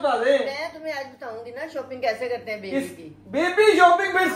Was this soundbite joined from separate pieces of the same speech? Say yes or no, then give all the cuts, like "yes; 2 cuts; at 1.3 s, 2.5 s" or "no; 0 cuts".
no; 0 cuts